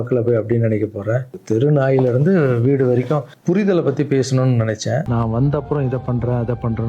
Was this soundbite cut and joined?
yes; 1 cut; at 5.1 s

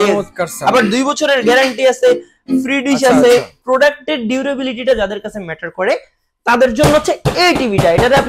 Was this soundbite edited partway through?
yes; 1 cut; at 3.6 s

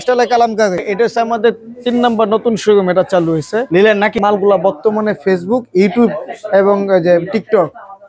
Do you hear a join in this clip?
yes; 2 cuts; at 0.8 s, 4.1 s

